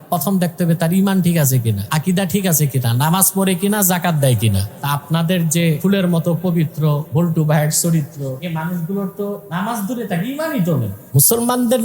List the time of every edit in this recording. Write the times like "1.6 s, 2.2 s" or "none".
1.8 s, 4.7 s, 5.8 s, 7.0 s, 8.4 s, 9.4 s, 11.0 s